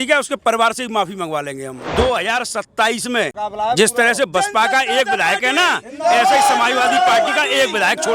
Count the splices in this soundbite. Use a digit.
2